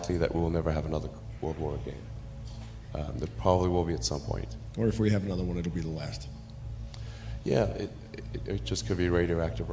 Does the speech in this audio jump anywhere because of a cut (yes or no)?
no